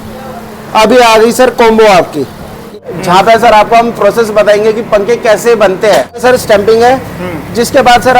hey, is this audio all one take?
no; 2 cuts; at 2.8 s, 6.2 s

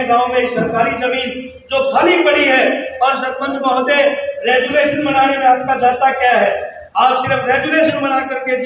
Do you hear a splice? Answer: no; 0 cuts

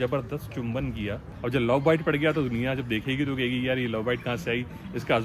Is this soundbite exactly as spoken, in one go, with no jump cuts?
no; 1 cut; at 1.3 s

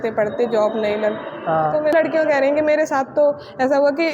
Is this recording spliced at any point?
yes; 1 cut; at 1.9 s

